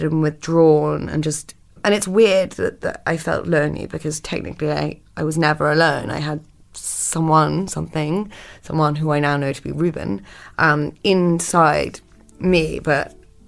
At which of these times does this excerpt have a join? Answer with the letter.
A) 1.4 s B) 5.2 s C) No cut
C